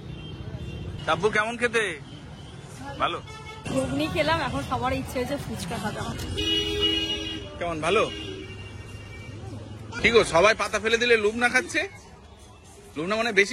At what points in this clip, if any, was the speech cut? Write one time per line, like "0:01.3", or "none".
0:01.0
0:03.5
0:06.1
0:09.9